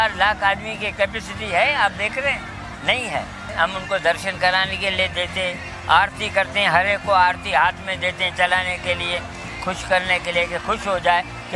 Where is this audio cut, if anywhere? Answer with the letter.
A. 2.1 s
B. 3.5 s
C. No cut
B